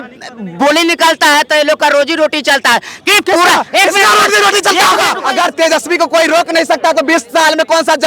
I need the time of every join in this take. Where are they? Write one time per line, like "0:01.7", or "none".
0:05.2